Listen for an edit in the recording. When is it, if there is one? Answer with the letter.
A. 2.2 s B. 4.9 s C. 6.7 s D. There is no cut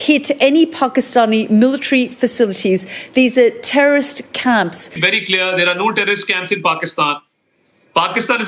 B